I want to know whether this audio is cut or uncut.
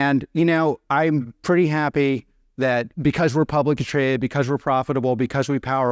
cut